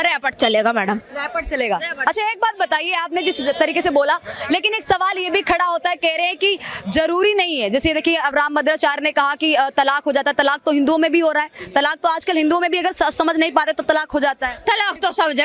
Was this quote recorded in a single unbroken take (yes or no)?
yes